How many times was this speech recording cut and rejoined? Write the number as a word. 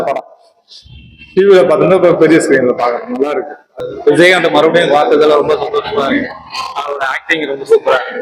one